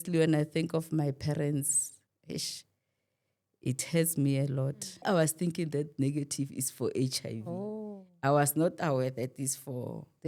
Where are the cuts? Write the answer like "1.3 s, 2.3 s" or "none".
5.0 s